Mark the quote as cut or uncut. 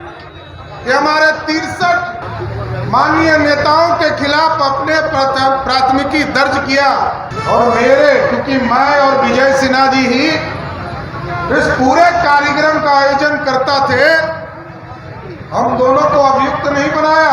cut